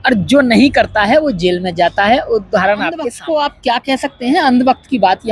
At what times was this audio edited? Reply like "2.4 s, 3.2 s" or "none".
3.2 s